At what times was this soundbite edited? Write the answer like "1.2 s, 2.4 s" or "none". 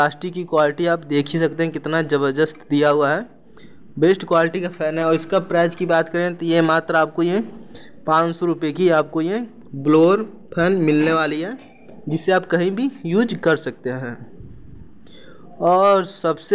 none